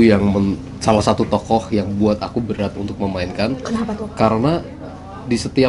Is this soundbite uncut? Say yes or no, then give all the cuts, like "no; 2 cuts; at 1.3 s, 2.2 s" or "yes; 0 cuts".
yes; 0 cuts